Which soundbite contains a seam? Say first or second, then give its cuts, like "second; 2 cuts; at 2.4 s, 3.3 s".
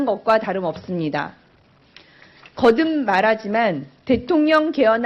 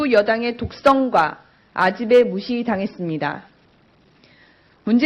first; 1 cut; at 1.5 s